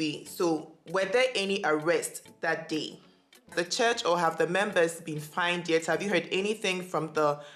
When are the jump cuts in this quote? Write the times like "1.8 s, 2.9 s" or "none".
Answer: 3.5 s